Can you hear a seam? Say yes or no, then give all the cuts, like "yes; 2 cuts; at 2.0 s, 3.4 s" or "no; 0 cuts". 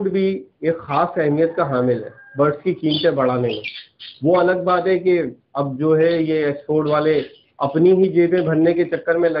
no; 0 cuts